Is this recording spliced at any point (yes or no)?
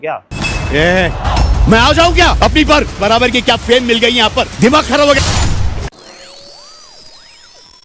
no